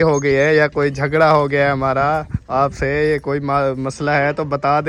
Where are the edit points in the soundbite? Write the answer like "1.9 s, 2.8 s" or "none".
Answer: none